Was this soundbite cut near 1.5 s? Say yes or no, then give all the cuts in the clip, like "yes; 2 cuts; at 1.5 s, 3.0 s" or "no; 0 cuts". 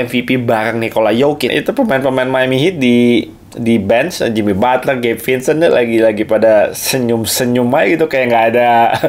yes; 1 cut; at 1.5 s